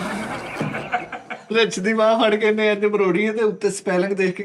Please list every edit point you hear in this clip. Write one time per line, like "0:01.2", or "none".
0:01.5